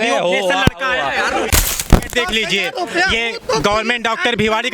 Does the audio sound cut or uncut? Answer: cut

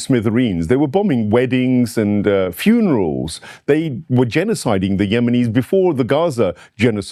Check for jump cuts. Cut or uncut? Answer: uncut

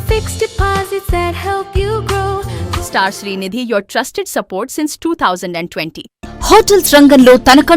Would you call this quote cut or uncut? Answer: cut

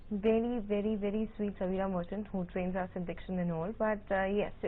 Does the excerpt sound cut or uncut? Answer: cut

